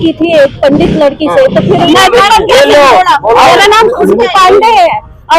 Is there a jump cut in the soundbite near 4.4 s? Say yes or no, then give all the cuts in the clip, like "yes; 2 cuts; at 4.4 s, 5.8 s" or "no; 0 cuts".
no; 1 cut; at 1.9 s